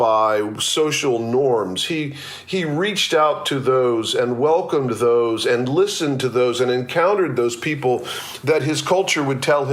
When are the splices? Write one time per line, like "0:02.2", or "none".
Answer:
none